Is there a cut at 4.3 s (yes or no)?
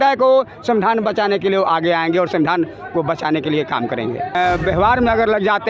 yes